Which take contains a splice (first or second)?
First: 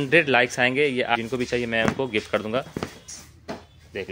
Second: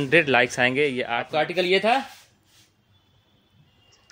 second